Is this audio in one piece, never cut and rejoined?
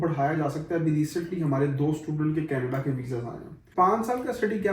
no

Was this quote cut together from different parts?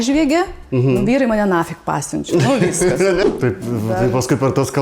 yes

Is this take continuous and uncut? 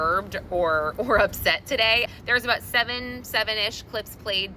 no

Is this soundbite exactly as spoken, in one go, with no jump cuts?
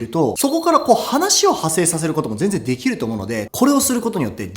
no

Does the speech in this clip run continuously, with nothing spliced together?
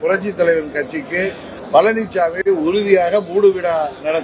no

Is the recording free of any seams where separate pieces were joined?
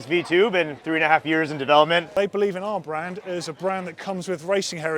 no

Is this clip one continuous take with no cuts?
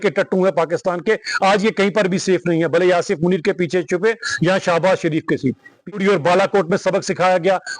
no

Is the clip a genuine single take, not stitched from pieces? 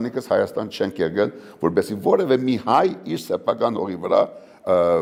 yes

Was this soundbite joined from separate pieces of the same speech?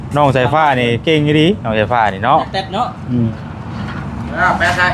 no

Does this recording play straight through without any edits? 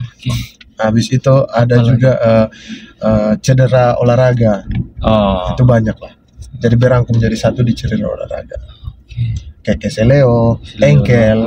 yes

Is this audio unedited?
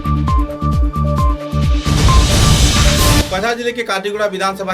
no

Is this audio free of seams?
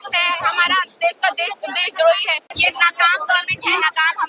no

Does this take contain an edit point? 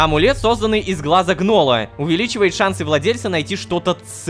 yes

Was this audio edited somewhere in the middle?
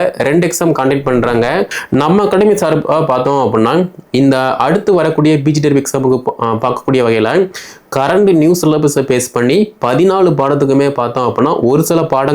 yes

